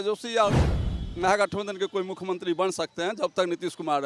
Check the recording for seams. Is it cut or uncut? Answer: uncut